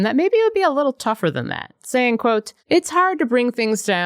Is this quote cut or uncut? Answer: cut